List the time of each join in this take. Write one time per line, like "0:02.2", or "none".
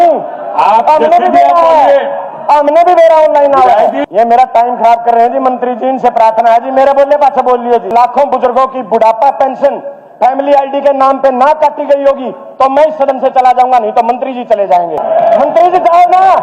0:04.0
0:07.9
0:15.0